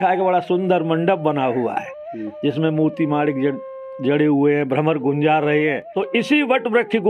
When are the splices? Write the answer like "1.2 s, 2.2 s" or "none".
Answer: 5.9 s